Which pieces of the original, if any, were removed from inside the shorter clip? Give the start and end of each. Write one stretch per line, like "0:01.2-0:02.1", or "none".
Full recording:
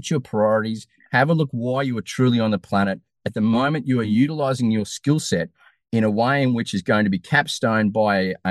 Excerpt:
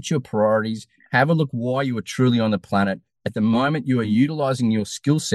none